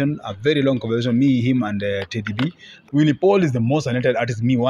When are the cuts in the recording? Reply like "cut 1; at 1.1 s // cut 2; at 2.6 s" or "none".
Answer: cut 1; at 2.8 s

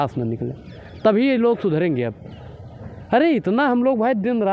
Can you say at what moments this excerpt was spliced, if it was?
none

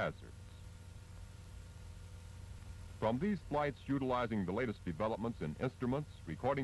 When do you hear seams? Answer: cut 1; at 4.1 s

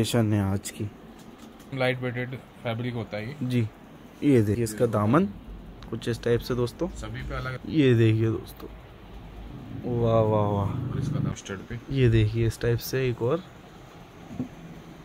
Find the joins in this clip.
cut 1; at 1.7 s // cut 2; at 4.6 s // cut 3; at 7.5 s // cut 4; at 11.3 s

